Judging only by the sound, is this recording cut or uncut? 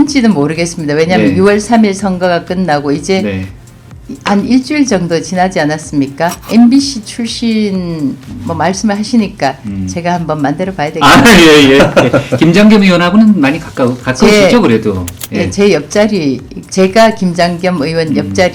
cut